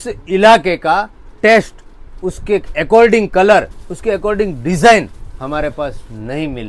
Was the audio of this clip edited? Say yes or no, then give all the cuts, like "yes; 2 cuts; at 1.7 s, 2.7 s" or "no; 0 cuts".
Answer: no; 0 cuts